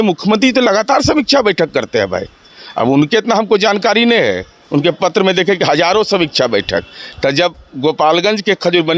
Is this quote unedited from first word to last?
yes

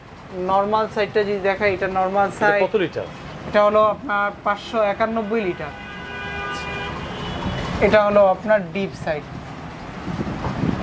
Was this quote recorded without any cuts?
yes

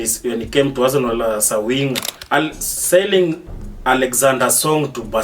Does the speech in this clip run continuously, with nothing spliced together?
no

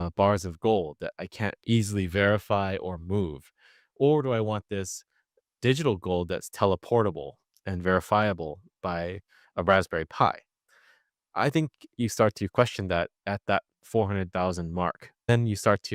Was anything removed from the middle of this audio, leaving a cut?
no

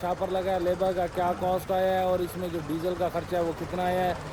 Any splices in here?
no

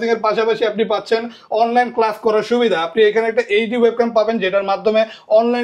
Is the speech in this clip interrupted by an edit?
no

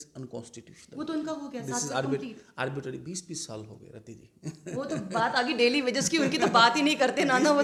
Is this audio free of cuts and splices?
yes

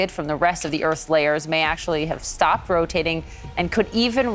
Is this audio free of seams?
yes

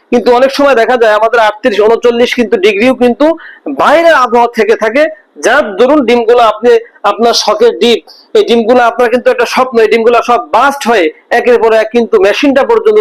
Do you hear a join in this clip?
no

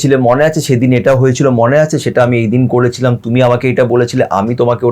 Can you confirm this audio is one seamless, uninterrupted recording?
yes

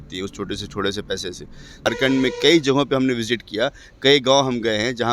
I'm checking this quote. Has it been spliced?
yes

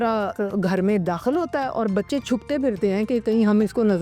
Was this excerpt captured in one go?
yes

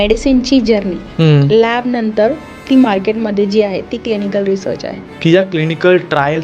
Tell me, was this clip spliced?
yes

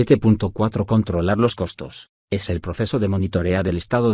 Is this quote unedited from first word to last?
no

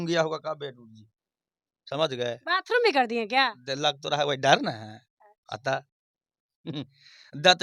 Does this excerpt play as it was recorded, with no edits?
yes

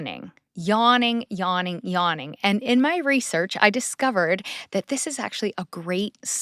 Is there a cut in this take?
no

